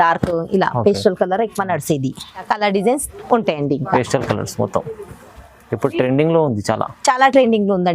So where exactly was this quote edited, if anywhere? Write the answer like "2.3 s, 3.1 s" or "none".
2.5 s